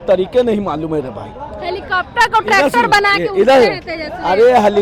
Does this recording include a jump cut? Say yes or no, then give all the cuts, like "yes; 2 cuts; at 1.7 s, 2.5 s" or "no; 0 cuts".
no; 0 cuts